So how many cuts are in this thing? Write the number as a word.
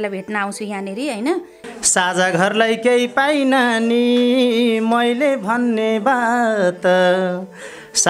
one